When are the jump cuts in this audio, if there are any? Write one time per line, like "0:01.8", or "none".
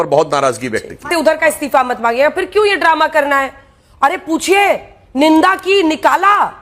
0:01.1